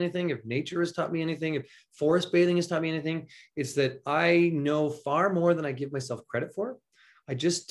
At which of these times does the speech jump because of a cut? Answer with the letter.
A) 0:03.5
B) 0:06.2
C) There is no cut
C